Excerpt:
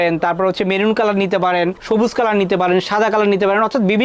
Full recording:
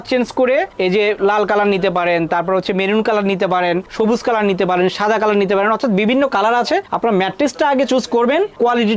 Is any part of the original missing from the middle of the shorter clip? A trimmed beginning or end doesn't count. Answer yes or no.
no